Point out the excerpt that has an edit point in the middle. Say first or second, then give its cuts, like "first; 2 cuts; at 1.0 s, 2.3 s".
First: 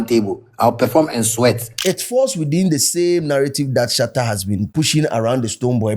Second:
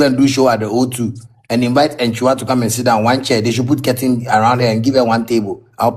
first; 2 cuts; at 1.7 s, 4.7 s